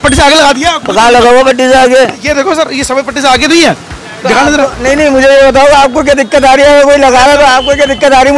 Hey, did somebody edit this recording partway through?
no; 0 cuts

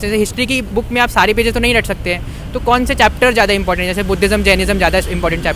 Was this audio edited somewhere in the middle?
no; 0 cuts

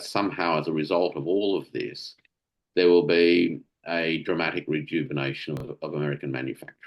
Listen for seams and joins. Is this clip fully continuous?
no; 1 cut; at 5.6 s

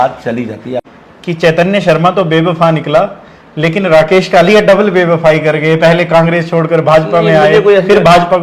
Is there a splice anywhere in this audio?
yes; 1 cut; at 0.9 s

